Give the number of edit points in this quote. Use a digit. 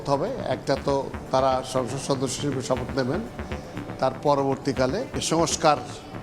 1